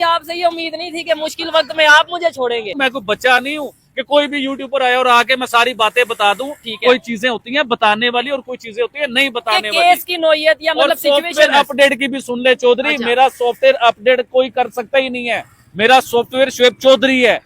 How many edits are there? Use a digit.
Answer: 1